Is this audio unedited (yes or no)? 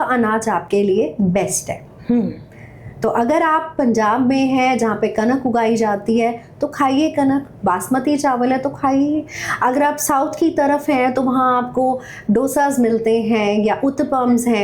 yes